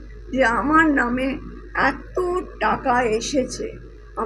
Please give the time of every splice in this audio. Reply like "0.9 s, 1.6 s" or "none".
none